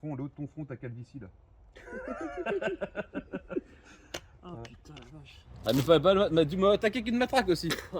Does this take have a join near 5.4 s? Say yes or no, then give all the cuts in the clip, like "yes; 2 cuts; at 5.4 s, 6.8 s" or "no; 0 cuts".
yes; 1 cut; at 5.4 s